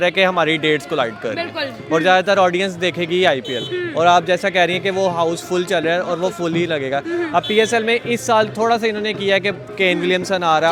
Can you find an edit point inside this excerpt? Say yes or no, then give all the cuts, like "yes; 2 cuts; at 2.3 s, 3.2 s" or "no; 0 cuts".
no; 0 cuts